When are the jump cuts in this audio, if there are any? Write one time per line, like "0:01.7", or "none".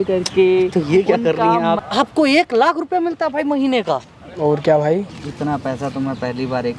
0:01.8
0:05.1